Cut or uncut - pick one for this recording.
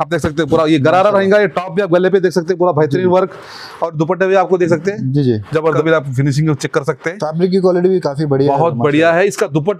cut